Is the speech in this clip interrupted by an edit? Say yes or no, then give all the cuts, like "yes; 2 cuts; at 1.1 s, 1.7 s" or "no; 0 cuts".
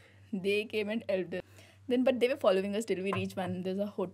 yes; 1 cut; at 1.4 s